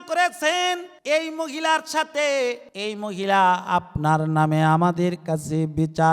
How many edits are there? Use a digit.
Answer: 2